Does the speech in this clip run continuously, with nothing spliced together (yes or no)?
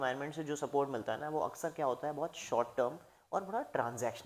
yes